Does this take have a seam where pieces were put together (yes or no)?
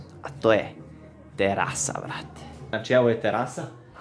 yes